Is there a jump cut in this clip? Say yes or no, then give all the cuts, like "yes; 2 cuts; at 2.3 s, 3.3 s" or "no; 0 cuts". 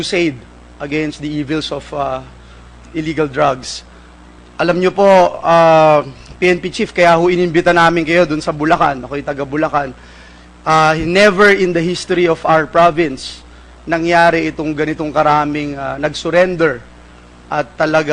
yes; 1 cut; at 6.8 s